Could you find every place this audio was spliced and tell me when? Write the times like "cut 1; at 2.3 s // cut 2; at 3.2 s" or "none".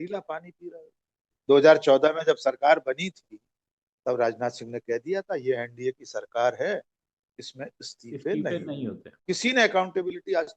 cut 1; at 1.3 s // cut 2; at 9.1 s